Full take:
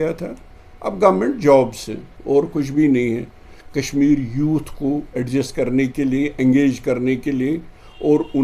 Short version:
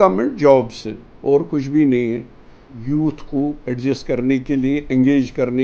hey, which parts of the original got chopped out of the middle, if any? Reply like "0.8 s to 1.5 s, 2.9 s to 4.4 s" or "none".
3.7 s to 4.2 s